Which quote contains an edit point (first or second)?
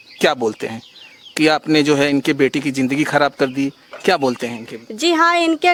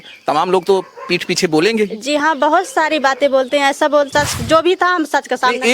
second